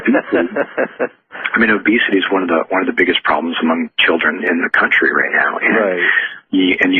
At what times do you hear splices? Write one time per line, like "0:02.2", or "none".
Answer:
0:01.4